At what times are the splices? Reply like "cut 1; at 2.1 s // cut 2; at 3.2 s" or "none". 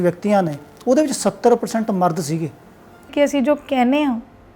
cut 1; at 3.1 s